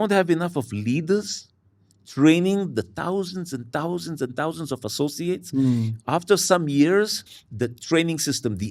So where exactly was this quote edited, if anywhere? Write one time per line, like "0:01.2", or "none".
none

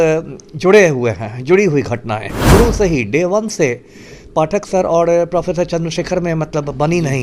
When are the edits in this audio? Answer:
0:02.3

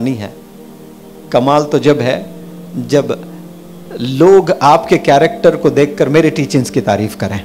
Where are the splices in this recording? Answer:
none

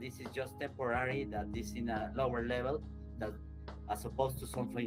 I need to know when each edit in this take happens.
none

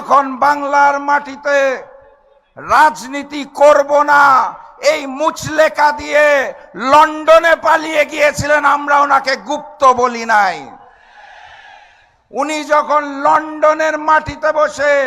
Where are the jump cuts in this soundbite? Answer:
none

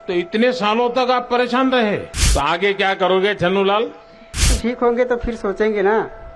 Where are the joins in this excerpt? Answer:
0:02.2
0:04.5

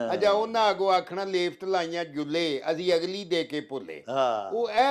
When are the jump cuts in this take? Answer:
none

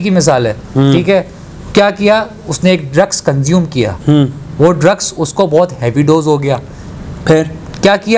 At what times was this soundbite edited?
none

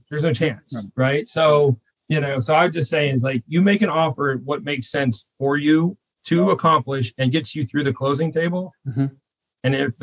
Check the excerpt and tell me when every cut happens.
0:01.9

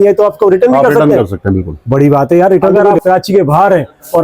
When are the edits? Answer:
0:02.9

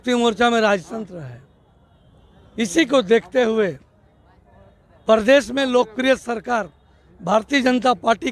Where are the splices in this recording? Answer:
none

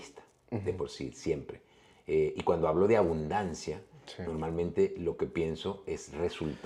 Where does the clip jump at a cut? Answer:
none

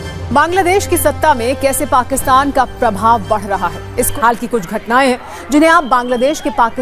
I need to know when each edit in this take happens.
0:04.1

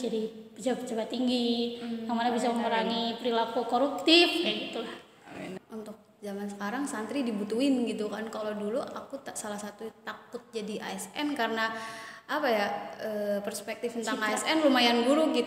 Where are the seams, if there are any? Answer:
0:05.5

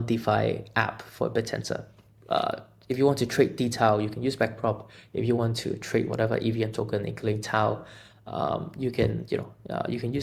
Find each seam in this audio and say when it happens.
none

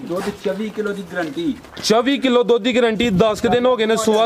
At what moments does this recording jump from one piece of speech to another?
none

